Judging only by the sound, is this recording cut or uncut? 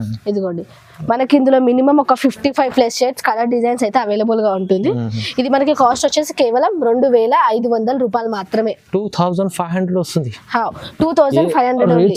uncut